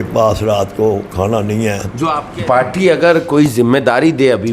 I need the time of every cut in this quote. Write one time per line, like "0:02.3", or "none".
0:02.0